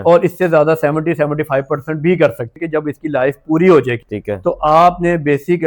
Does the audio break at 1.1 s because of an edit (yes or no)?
no